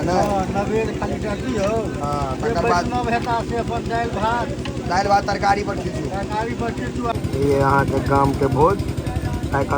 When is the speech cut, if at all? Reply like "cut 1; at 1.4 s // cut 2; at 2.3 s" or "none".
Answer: cut 1; at 7.1 s